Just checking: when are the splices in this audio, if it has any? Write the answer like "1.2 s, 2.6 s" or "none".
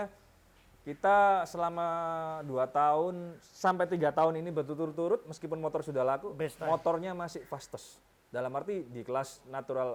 none